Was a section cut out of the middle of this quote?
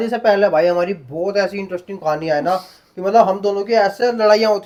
no; 0 cuts

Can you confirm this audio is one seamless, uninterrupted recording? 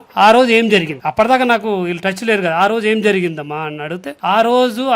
no; 2 cuts; at 1.0 s, 4.1 s

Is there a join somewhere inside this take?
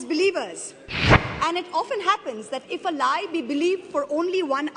no; 0 cuts

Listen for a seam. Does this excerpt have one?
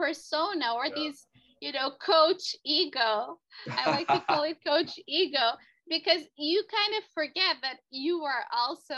no; 0 cuts

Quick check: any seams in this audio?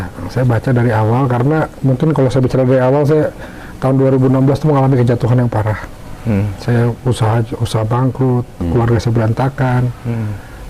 no; 0 cuts

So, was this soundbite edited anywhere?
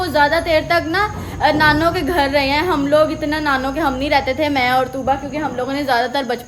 no; 0 cuts

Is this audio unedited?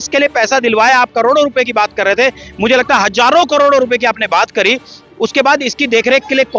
yes; 0 cuts

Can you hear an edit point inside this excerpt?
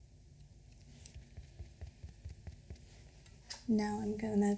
yes; 2 cuts; at 1.1 s, 3.4 s

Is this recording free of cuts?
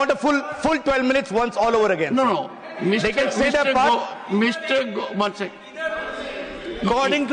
yes; 0 cuts

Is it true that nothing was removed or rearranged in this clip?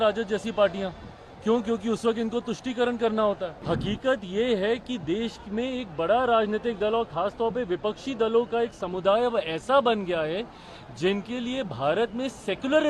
no; 1 cut; at 3.5 s

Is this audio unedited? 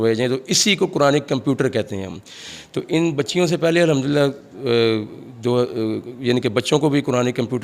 yes; 0 cuts

